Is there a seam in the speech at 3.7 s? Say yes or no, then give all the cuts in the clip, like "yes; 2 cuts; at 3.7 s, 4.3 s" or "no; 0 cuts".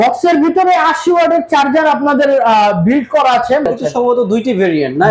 yes; 1 cut; at 3.7 s